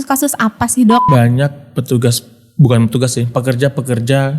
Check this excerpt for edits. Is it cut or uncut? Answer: cut